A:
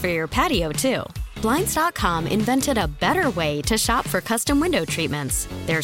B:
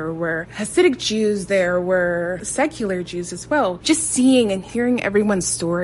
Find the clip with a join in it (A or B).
B